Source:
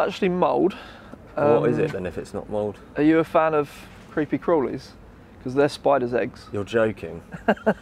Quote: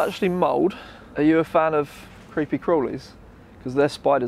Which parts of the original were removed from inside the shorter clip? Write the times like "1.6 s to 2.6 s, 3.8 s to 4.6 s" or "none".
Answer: 1.0 s to 2.8 s